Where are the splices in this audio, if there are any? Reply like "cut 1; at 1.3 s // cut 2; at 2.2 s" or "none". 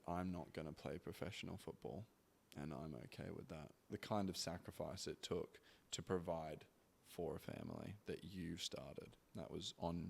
cut 1; at 3.9 s